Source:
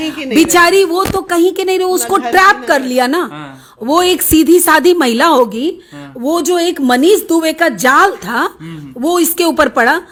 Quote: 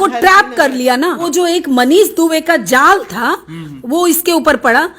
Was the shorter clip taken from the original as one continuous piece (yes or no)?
no